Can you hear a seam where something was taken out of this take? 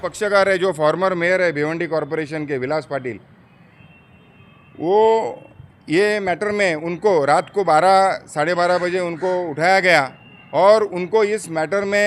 no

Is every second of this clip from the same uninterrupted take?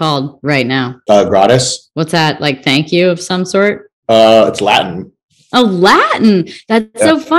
no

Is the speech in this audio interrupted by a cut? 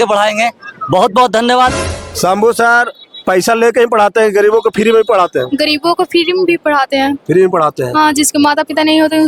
yes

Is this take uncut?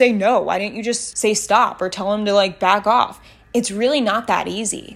no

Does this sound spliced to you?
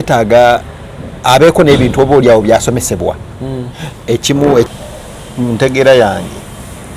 yes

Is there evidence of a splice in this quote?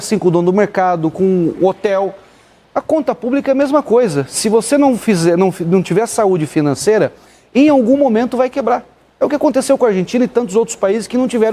no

